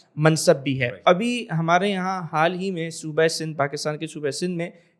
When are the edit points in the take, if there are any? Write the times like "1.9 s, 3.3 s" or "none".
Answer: 1.0 s